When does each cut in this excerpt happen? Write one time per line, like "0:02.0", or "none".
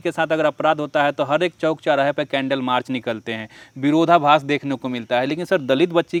none